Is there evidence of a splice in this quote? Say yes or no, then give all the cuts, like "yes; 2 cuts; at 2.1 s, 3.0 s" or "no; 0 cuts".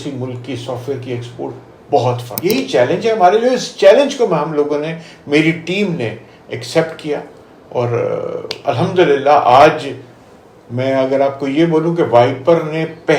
yes; 1 cut; at 2.3 s